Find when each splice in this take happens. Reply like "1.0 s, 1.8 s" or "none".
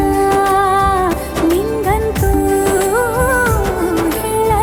none